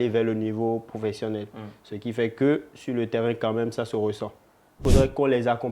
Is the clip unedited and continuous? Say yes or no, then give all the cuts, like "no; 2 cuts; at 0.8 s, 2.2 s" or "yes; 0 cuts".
no; 1 cut; at 4.8 s